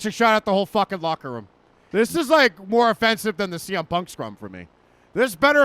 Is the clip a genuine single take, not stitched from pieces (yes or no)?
no